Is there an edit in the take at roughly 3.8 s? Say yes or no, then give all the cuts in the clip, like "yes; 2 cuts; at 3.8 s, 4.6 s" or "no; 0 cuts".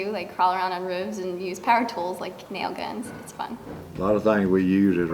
yes; 1 cut; at 3.8 s